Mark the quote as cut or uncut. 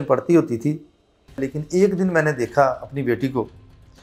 cut